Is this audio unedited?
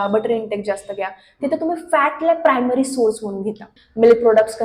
no; 1 cut; at 3.7 s

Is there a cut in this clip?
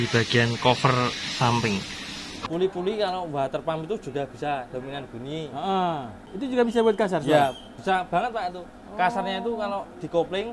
yes; 2 cuts; at 2.4 s, 6.2 s

